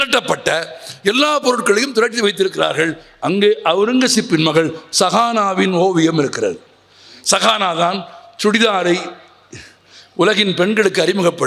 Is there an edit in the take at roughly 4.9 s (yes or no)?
no